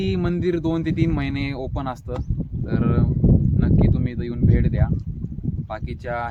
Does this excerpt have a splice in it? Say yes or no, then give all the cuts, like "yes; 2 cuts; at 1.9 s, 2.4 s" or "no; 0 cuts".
no; 0 cuts